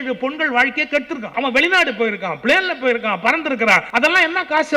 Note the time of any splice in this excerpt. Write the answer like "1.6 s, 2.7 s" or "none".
1.3 s, 3.9 s